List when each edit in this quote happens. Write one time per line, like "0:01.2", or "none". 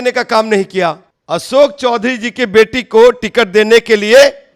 0:01.1

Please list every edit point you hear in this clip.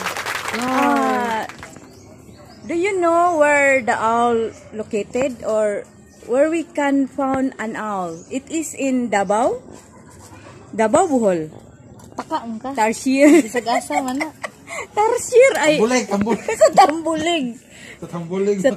none

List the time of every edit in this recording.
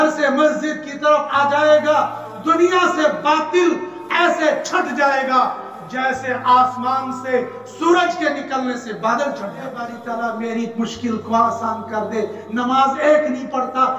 0:10.0

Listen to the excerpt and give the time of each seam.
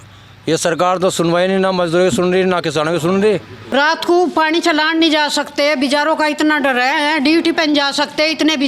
0:03.7

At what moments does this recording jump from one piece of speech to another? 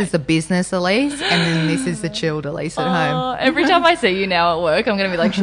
none

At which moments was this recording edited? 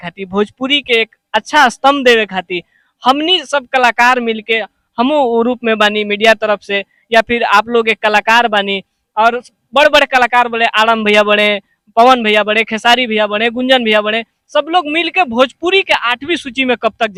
none

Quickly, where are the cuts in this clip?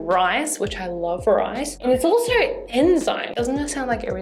none

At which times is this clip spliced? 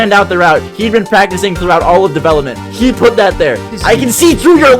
0:03.7

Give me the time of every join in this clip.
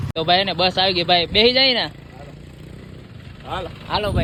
none

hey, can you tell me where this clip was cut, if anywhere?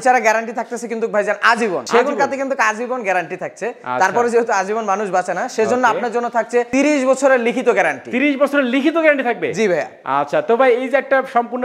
none

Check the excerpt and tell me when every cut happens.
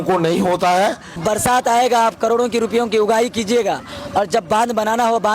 0:01.2

